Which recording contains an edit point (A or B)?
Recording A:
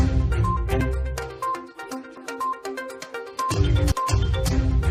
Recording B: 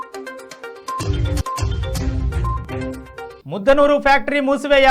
B